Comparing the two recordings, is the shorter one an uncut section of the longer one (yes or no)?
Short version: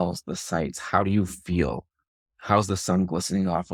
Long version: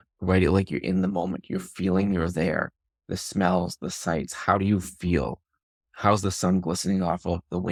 yes